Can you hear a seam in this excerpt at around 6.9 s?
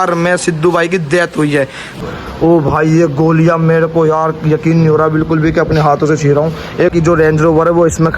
yes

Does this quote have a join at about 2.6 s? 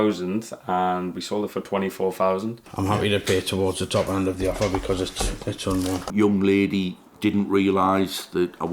yes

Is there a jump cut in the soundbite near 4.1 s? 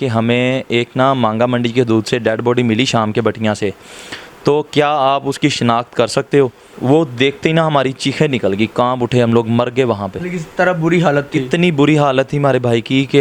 no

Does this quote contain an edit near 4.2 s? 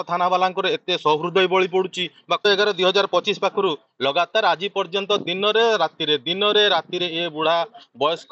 no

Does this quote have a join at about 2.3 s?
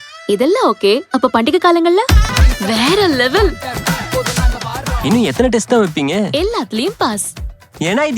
yes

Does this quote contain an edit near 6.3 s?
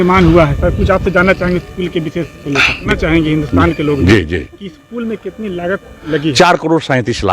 no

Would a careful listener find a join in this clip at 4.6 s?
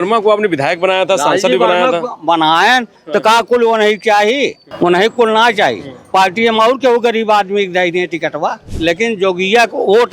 yes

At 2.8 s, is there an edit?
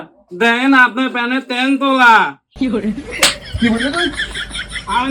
no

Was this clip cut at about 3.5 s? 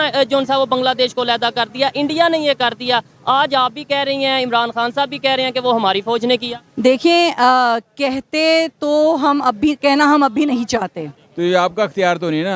no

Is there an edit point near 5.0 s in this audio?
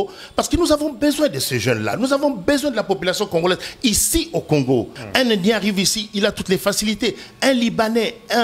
yes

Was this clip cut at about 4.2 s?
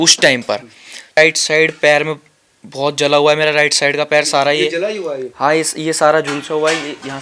no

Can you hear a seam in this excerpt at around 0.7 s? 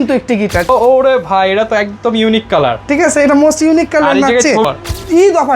yes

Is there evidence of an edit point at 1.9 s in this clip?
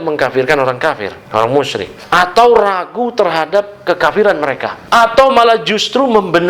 yes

